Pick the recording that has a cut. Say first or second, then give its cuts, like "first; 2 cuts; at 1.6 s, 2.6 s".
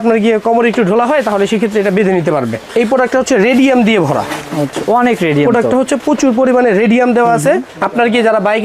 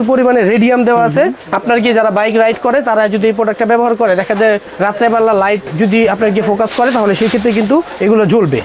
first; 1 cut; at 2.6 s